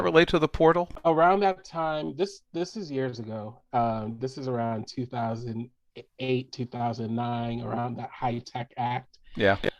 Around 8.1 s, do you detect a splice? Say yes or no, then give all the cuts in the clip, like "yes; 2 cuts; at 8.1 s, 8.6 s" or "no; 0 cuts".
no; 1 cut; at 0.9 s